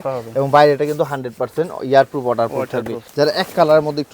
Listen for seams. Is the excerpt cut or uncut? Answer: cut